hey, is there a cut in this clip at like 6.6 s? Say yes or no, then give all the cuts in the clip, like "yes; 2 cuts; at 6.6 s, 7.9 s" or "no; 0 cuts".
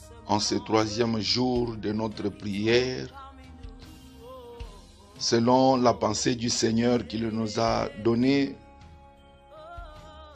no; 3 cuts; at 3.1 s, 5.3 s, 8.6 s